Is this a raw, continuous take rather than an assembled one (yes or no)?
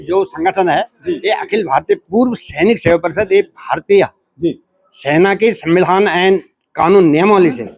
yes